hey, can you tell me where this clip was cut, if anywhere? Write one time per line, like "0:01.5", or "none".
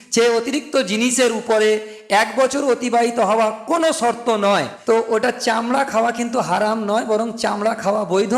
0:04.7